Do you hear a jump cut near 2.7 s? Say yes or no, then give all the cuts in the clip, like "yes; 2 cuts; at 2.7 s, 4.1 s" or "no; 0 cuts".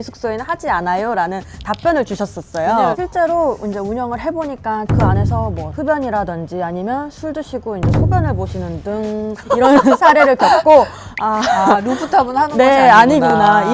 yes; 2 cuts; at 2.7 s, 4.9 s